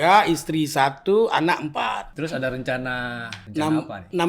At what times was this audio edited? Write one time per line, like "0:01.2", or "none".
0:02.1
0:03.3